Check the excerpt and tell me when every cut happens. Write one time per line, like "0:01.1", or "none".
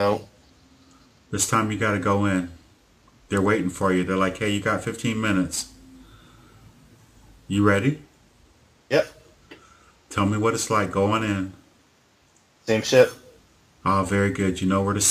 0:01.4